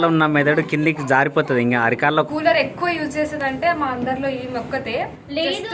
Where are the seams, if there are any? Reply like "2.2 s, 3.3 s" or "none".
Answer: 2.3 s